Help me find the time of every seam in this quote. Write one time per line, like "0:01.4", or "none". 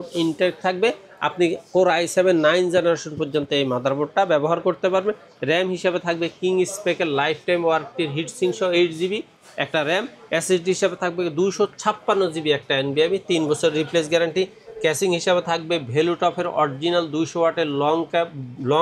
none

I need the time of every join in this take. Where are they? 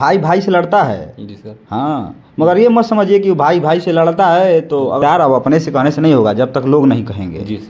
0:05.0

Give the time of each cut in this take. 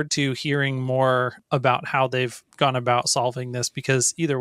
0:01.4

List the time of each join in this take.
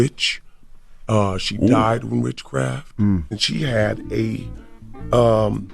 0:03.4

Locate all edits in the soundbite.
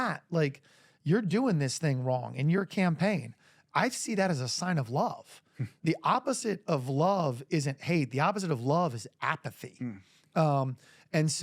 0:05.8

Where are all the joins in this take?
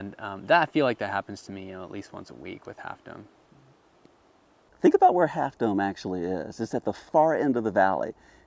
none

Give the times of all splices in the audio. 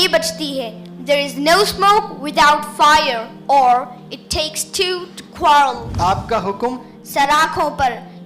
0:05.8

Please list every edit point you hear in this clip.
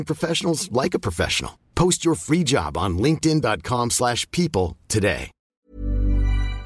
0:05.6

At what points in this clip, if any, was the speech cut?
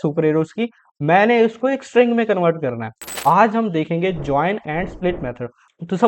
0:03.1

